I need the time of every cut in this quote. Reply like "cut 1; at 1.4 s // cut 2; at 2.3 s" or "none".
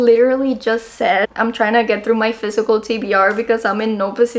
cut 1; at 1.3 s

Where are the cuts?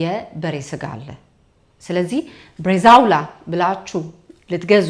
none

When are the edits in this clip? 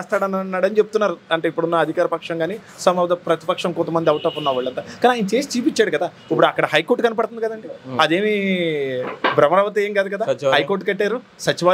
none

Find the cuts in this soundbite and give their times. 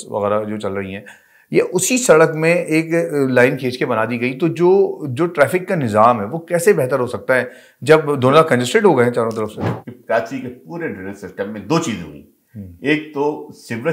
cut 1; at 9.6 s

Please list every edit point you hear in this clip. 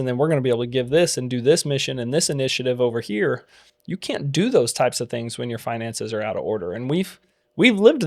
none

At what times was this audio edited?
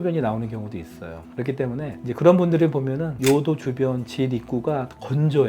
none

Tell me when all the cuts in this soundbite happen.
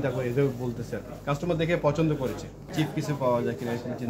cut 1; at 2.7 s

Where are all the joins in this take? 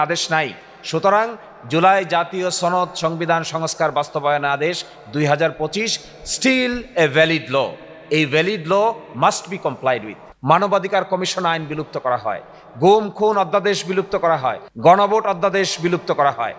cut 1; at 10.3 s // cut 2; at 14.7 s

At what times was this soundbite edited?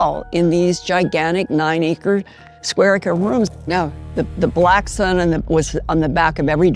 cut 1; at 3.5 s

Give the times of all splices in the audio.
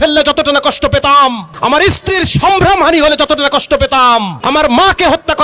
cut 1; at 1.5 s // cut 2; at 4.3 s

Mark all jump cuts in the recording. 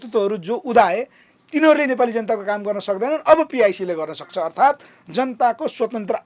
none

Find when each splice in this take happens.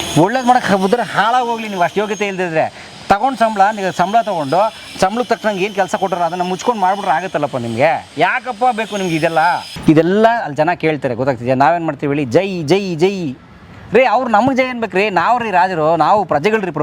cut 1; at 9.7 s

